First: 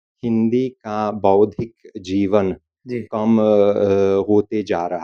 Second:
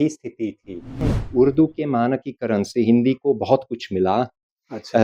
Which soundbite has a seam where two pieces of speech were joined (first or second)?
second